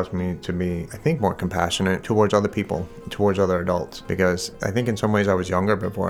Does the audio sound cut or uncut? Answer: cut